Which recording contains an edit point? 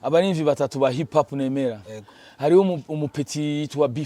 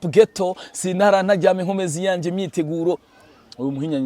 second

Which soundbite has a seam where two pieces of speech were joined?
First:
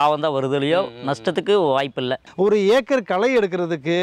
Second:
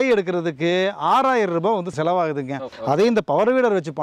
first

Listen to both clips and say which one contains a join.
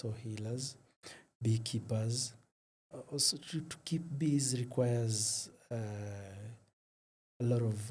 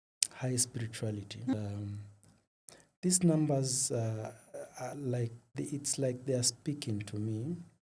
second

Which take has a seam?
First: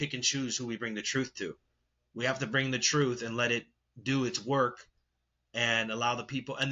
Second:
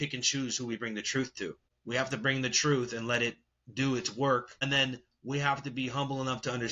second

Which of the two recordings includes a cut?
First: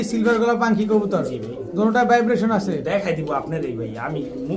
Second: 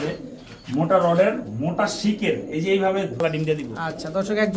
second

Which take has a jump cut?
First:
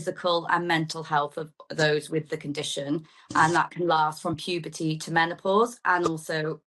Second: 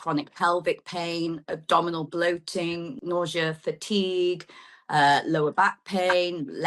second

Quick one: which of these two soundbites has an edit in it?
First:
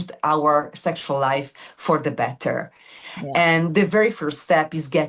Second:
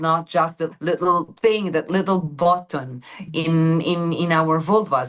second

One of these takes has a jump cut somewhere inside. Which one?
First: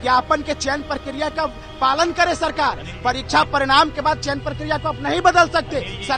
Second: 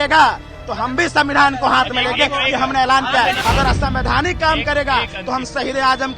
second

